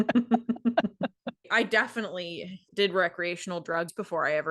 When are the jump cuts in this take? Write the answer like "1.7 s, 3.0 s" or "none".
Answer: 1.3 s, 2.7 s